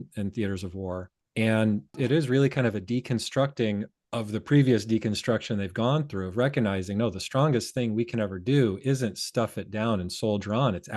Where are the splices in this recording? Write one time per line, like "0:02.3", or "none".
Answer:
0:01.2
0:02.0
0:04.0